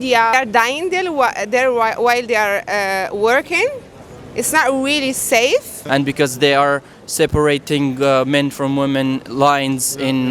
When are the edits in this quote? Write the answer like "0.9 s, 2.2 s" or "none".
5.8 s